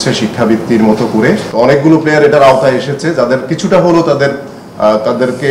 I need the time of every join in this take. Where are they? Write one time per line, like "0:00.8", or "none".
0:01.5

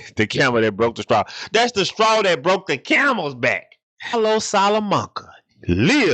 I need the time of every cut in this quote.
0:04.1

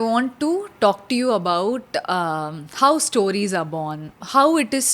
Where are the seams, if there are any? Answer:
none

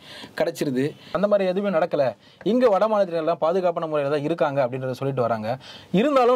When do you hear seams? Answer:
0:01.1

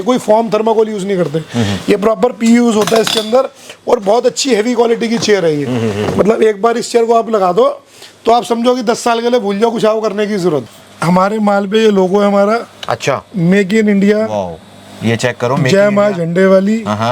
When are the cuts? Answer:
0:10.7

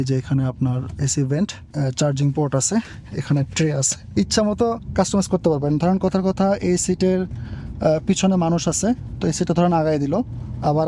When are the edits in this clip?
0:01.6
0:04.0

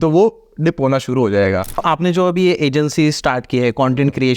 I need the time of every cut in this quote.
0:01.8

